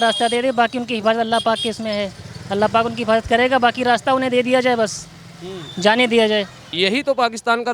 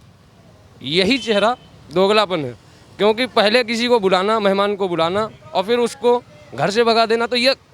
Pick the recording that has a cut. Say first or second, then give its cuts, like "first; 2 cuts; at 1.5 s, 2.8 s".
first; 1 cut; at 6.6 s